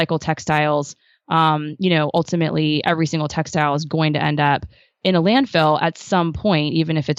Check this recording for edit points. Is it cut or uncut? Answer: uncut